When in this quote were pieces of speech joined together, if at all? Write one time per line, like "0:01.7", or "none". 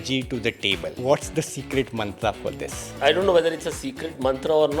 0:00.9
0:02.9